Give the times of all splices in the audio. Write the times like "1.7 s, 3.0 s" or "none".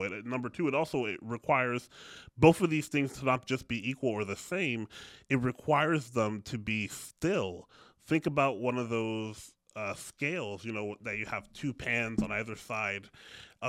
none